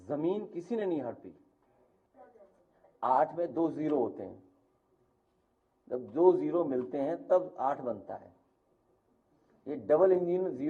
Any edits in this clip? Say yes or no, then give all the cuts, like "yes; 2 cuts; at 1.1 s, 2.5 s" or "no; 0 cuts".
yes; 1 cut; at 2.0 s